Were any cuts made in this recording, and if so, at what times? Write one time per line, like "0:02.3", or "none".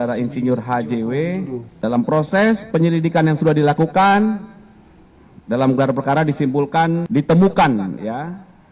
0:01.6
0:07.1